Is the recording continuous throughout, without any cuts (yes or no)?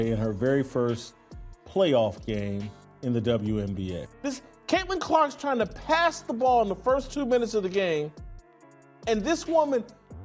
no